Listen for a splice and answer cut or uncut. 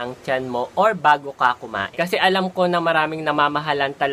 cut